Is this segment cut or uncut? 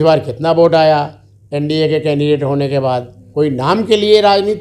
cut